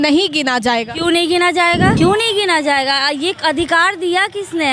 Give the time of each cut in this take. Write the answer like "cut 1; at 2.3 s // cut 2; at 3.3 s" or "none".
cut 1; at 1.9 s